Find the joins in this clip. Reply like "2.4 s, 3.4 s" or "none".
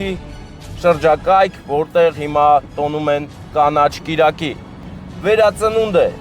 4.9 s